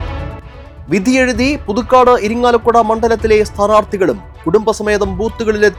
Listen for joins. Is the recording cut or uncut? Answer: uncut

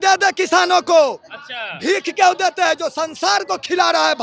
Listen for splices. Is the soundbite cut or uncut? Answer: uncut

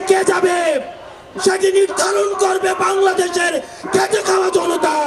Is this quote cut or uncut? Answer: uncut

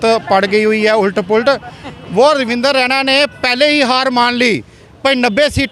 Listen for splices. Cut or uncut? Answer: uncut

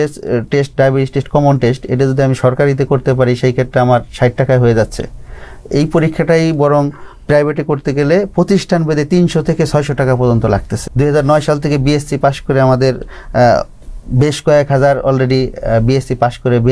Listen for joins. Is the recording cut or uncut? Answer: cut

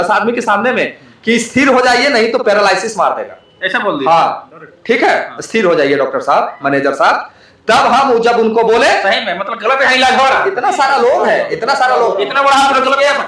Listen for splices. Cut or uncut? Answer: uncut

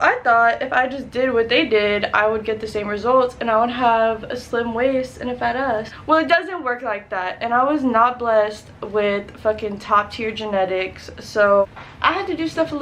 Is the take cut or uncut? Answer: cut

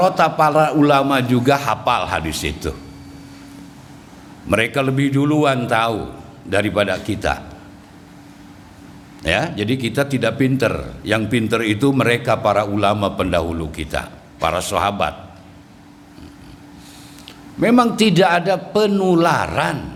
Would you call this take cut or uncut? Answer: uncut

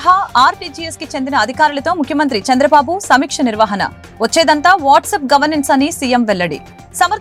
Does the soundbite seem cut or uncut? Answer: uncut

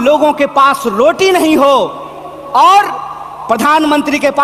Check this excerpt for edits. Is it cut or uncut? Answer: uncut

